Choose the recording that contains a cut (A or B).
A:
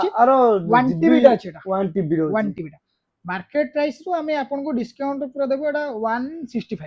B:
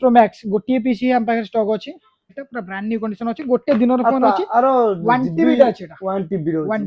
B